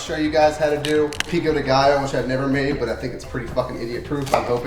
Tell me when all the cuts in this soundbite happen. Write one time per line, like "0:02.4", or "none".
0:01.3